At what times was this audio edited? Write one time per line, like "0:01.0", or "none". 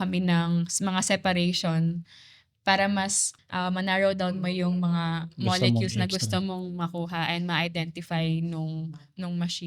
0:03.2